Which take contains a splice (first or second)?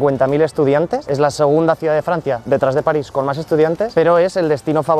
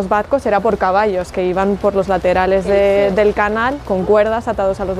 first